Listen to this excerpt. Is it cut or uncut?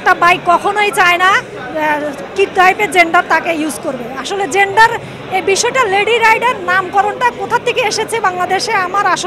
uncut